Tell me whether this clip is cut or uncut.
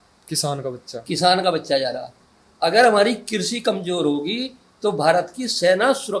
uncut